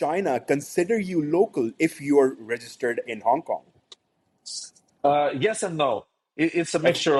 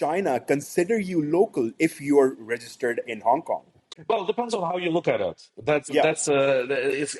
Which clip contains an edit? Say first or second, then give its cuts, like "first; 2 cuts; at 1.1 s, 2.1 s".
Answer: second; 1 cut; at 3.9 s